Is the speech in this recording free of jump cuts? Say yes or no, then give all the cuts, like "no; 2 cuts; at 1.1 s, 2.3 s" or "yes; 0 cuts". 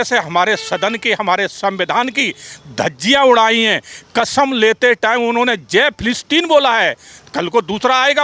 yes; 0 cuts